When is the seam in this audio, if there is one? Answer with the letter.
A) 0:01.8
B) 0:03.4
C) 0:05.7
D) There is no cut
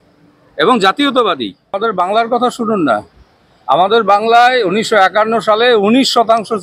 A